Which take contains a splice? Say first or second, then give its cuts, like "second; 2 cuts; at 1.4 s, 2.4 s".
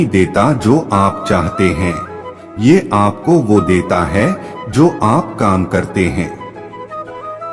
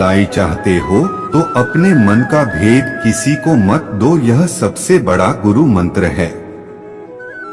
first; 1 cut; at 6.4 s